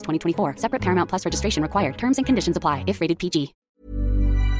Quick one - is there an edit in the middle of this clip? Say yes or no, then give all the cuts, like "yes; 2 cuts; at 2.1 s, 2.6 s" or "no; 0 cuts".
yes; 1 cut; at 3.7 s